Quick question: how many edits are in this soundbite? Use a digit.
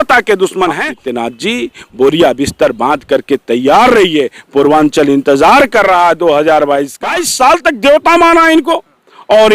2